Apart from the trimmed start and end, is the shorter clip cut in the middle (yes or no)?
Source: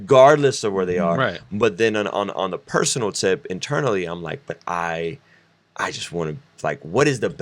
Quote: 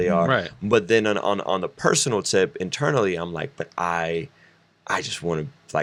no